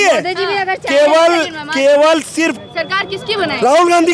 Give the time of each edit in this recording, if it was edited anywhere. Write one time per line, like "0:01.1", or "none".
0:02.5